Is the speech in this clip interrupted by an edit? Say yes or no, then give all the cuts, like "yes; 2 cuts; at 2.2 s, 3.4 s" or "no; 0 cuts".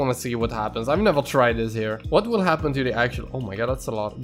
yes; 1 cut; at 2.0 s